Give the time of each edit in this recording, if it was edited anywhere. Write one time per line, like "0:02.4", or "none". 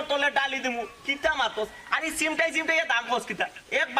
0:01.1